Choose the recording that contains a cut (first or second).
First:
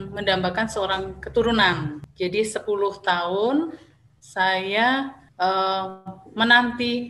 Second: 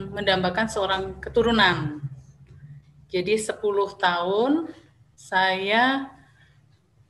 first